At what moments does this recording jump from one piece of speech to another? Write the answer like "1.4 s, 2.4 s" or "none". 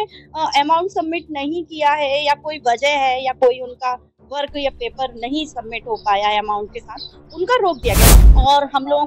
8.1 s